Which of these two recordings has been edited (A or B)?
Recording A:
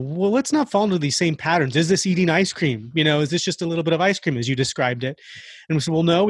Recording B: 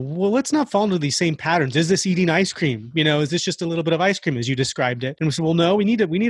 B